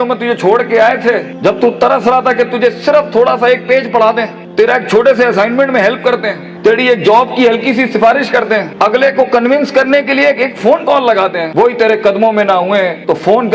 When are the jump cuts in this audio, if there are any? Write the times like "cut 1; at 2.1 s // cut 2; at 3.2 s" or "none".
none